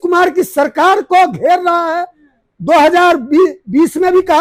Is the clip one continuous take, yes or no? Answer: yes